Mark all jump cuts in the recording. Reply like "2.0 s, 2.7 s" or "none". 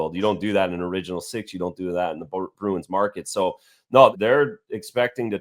4.1 s

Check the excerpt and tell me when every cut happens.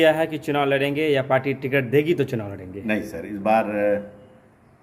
none

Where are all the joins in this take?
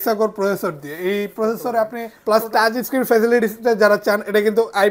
2.1 s

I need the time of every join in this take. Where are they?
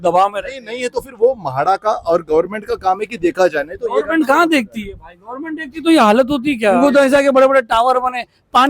6.8 s

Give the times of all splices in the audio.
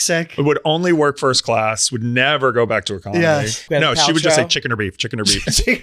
3.6 s

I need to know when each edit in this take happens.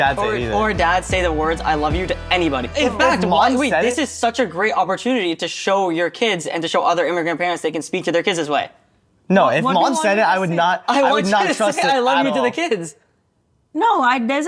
2.7 s

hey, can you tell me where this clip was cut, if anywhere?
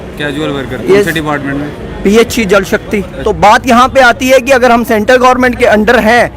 3.1 s

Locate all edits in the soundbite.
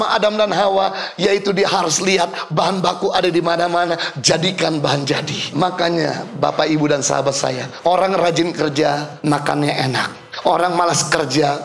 5.5 s, 7.7 s, 9.1 s, 10.2 s

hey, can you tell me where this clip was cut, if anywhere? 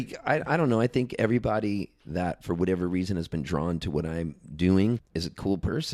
5.1 s

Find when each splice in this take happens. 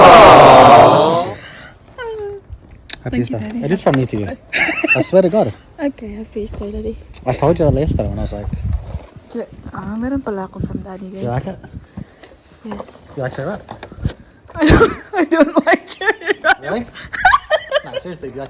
1.3 s

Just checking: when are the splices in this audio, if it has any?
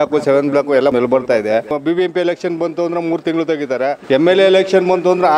0.9 s, 1.7 s, 4.0 s

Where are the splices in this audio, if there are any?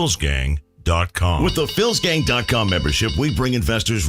none

